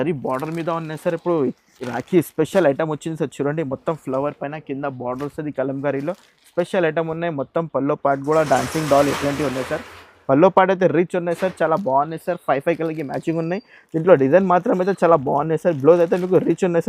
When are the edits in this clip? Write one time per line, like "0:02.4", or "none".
none